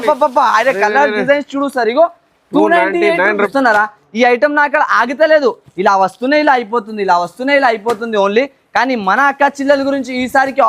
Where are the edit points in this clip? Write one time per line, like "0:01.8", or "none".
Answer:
0:03.5